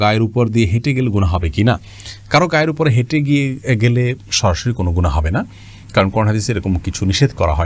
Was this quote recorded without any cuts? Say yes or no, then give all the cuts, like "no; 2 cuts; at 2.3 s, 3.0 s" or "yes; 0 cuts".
yes; 0 cuts